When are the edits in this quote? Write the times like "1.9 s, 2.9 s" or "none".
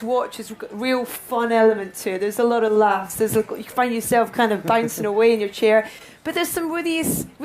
4.0 s